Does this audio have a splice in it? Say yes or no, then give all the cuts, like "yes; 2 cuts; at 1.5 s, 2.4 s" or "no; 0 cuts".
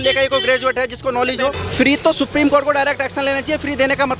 yes; 1 cut; at 1.6 s